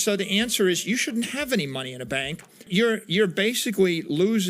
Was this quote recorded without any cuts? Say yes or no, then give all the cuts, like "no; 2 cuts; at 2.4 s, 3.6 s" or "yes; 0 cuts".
no; 1 cut; at 2.7 s